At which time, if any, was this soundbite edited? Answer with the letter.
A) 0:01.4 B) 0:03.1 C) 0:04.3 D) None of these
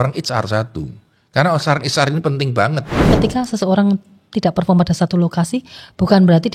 B